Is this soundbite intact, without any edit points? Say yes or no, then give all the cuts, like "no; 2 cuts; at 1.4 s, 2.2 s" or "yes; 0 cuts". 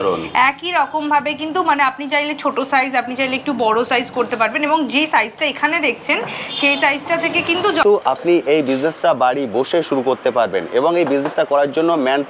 no; 1 cut; at 7.8 s